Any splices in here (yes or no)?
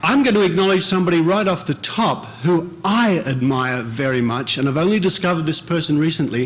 no